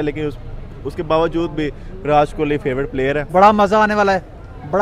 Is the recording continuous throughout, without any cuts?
no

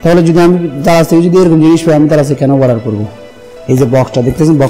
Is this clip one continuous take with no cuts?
no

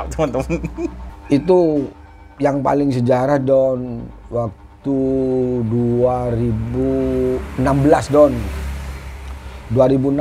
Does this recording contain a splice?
yes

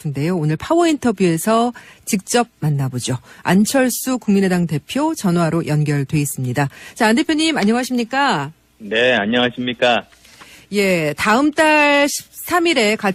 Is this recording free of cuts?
yes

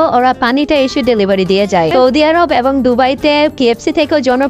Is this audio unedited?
no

